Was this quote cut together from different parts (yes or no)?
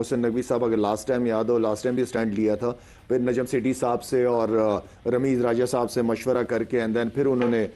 no